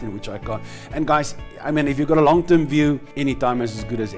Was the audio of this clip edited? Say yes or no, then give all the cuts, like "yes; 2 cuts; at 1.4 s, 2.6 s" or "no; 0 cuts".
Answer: yes; 1 cut; at 3.1 s